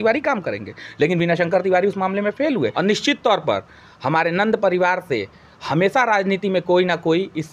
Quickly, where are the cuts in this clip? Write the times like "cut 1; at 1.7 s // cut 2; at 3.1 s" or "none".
cut 1; at 2.7 s